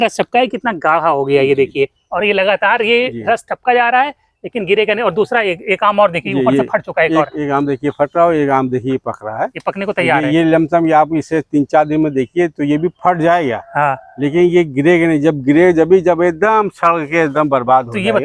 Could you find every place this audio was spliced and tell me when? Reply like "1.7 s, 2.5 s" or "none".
none